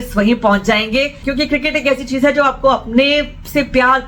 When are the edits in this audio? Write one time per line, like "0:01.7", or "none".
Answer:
0:01.2